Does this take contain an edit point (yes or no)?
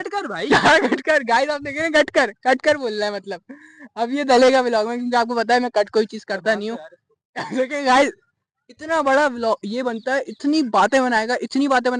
no